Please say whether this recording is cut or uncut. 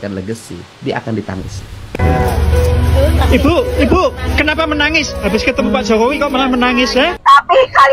cut